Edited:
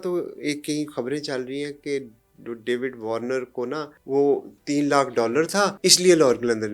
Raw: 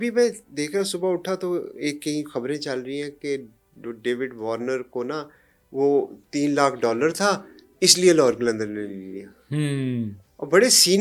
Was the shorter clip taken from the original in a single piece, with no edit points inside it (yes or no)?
no